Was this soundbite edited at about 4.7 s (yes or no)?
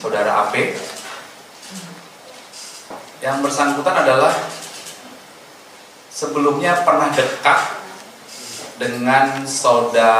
no